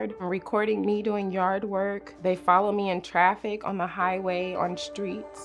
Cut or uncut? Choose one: cut